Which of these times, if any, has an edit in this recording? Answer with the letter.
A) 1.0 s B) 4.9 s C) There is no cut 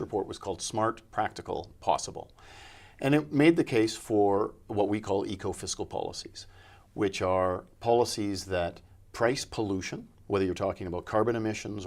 C